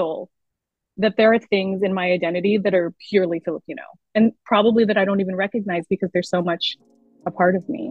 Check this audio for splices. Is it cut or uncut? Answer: uncut